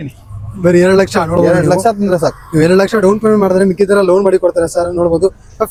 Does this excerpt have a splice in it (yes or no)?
no